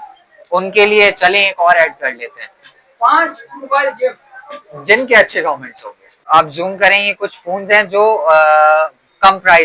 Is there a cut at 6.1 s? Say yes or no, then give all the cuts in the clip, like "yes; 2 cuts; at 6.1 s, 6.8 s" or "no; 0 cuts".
yes; 1 cut; at 6.1 s